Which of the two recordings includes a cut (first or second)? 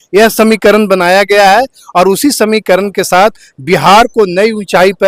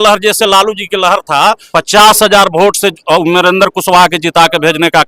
second